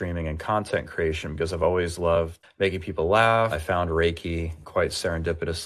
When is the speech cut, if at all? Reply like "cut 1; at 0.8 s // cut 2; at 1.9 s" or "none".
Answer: cut 1; at 2.4 s // cut 2; at 3.6 s // cut 3; at 4.6 s